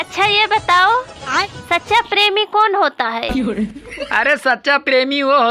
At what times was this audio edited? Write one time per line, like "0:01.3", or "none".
none